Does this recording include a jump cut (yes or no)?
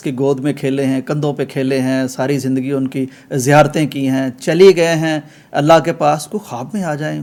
no